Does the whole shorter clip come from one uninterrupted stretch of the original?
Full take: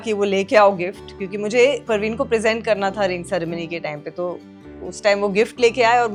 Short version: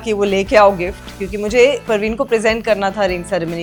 yes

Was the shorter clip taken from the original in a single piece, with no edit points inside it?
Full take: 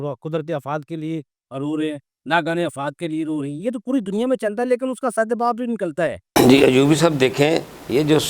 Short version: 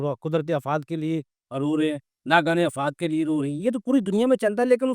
yes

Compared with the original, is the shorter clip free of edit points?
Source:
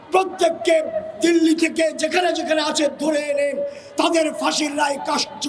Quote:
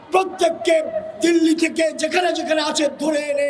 yes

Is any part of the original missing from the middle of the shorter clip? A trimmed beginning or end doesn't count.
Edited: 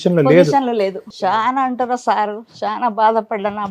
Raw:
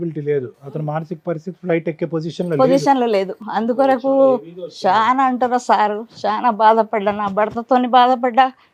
yes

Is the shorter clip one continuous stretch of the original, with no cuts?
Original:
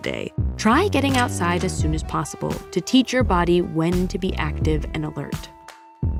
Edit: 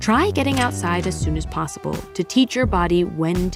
yes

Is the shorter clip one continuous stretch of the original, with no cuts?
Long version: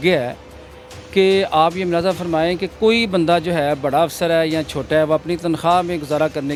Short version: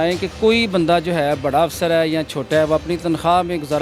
yes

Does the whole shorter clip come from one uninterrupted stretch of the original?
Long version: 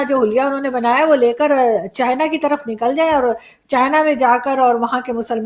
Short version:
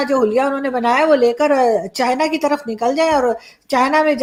yes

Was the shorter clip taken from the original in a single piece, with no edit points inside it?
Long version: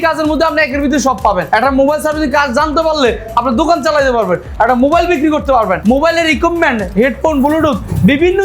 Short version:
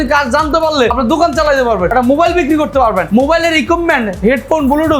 no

